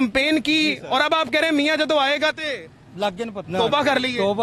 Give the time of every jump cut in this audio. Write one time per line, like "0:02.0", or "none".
0:03.4